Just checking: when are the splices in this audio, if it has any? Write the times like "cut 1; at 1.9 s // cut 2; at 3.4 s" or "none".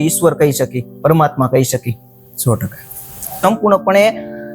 cut 1; at 3.4 s